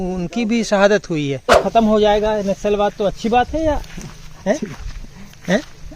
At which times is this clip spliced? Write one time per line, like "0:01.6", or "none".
0:01.5